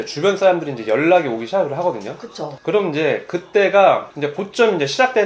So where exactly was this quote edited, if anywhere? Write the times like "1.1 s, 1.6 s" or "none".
none